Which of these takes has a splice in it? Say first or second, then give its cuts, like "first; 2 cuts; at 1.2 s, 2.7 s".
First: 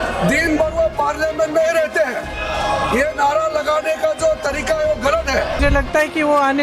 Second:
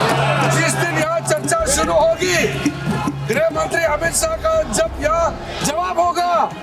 first; 1 cut; at 5.6 s